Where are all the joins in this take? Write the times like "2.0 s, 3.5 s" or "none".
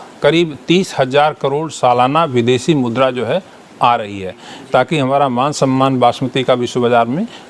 4.5 s